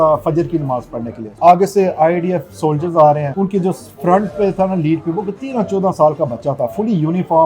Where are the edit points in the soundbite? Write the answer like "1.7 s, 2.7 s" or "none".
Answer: 1.2 s, 3.3 s